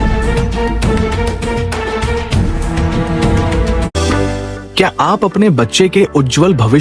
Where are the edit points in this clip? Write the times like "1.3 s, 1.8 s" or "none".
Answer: none